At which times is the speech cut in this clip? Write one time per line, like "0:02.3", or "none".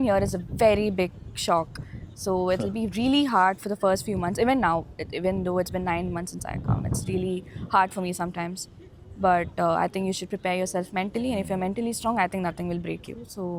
none